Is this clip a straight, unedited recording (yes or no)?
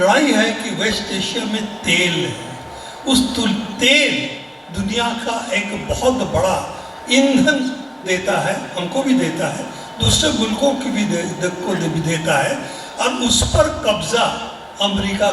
yes